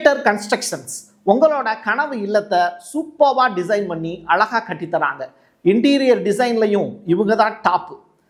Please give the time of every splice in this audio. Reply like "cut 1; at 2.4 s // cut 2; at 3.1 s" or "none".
none